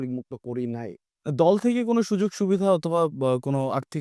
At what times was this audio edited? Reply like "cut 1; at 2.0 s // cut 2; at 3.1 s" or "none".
cut 1; at 1.1 s